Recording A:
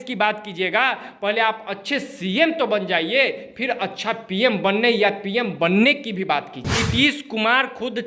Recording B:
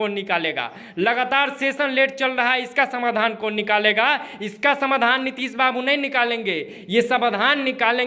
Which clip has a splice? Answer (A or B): A